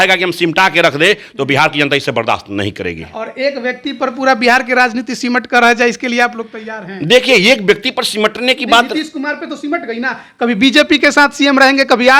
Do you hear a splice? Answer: no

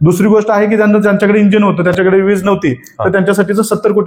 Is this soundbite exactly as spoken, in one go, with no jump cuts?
yes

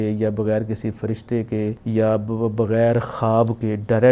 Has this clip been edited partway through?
yes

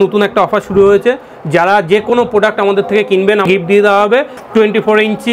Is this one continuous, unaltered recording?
no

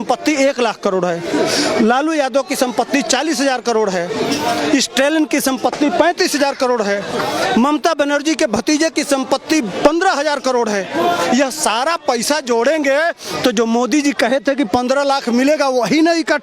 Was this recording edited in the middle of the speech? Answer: no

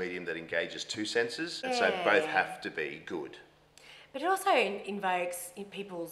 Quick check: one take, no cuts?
no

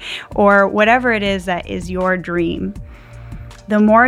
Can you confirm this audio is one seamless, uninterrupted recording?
yes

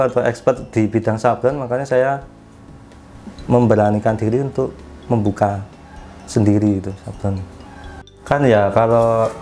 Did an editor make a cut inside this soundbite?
yes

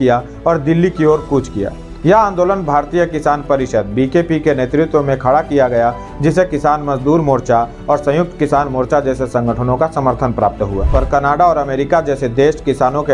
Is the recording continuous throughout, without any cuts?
no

